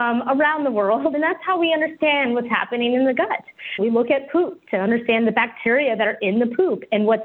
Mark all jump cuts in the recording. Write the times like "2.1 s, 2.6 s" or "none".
1.1 s